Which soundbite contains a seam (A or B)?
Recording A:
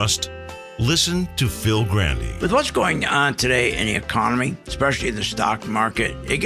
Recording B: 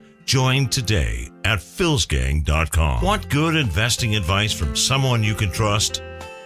B